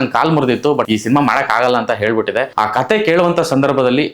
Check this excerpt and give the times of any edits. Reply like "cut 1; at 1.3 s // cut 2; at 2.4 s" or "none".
cut 1; at 0.9 s // cut 2; at 2.5 s